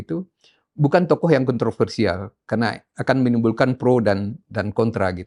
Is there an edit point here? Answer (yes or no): no